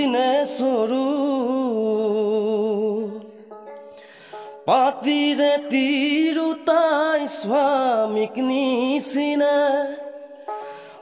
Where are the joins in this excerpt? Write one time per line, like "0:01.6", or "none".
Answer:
none